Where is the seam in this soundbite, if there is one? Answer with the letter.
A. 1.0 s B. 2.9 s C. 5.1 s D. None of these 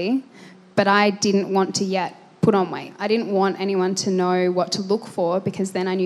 B